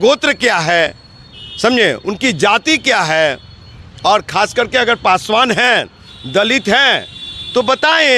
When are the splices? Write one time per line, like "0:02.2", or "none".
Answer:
none